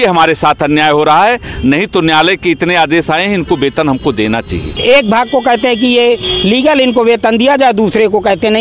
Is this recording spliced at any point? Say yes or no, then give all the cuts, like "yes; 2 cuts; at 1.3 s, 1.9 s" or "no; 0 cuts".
yes; 1 cut; at 4.6 s